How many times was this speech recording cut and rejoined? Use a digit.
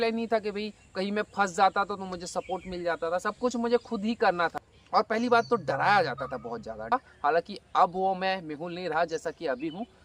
2